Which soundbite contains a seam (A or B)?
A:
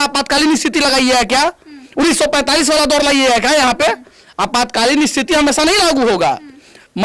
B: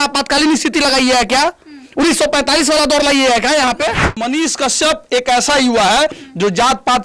B